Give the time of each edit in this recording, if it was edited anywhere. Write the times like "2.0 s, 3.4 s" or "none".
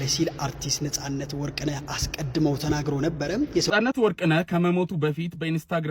3.7 s

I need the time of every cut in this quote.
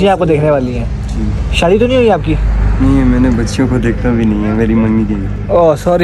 none

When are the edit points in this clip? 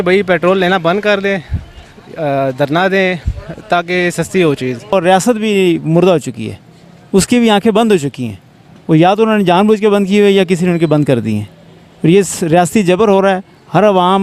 4.9 s

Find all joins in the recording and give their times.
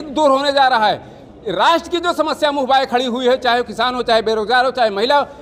none

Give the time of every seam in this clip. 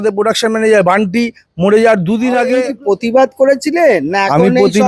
2.7 s

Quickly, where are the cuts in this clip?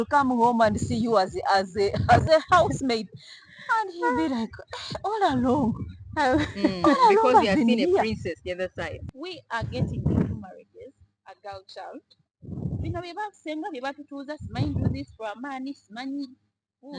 2.2 s, 9.0 s

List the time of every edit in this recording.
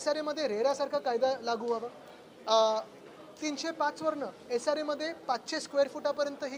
none

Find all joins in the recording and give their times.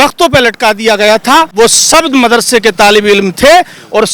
1.5 s

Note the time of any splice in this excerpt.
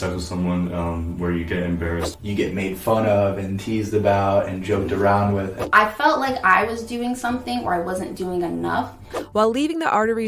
2.1 s, 5.6 s, 9.2 s

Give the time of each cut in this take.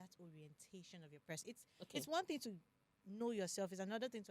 1.5 s

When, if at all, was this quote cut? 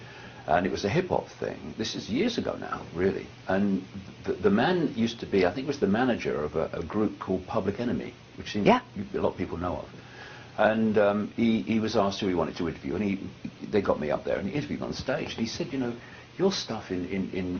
14.0 s

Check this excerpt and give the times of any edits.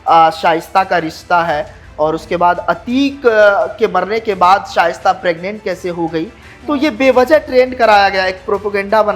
none

